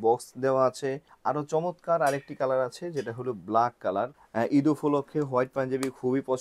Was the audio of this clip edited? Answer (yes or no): yes